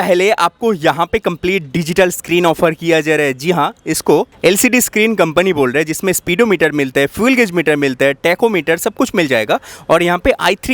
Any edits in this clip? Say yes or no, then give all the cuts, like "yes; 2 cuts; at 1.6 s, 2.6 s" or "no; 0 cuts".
no; 0 cuts